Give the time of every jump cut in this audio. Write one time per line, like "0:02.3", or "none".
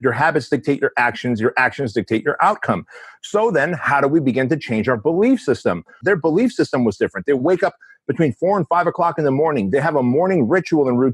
0:06.0